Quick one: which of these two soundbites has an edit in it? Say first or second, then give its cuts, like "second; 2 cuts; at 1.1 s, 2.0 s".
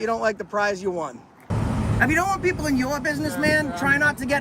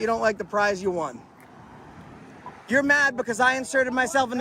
first; 1 cut; at 1.5 s